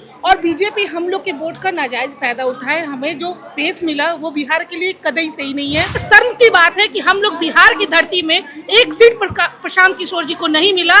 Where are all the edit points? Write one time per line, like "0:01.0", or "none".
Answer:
0:06.0